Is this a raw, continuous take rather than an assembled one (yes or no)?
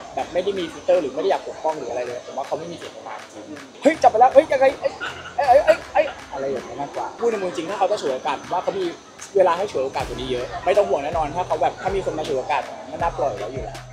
no